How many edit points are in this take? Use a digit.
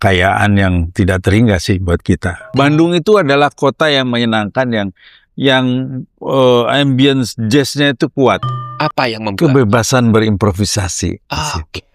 2